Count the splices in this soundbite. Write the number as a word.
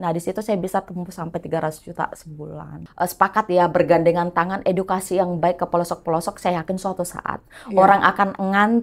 one